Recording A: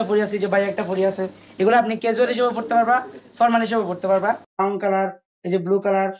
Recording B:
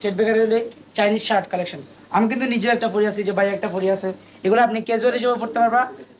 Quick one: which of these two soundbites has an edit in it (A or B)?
A